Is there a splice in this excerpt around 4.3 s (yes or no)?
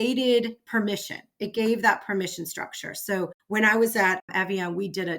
yes